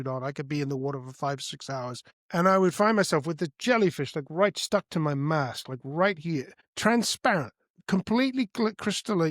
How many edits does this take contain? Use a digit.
2